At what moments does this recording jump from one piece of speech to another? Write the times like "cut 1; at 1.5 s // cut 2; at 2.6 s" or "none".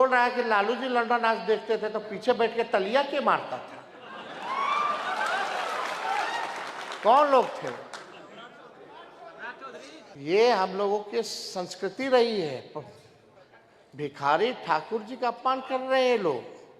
cut 1; at 10.1 s

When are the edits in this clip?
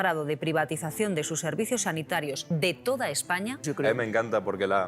cut 1; at 2.4 s // cut 2; at 3.6 s

